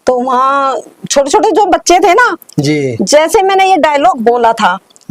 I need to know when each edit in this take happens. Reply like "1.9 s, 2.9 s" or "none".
none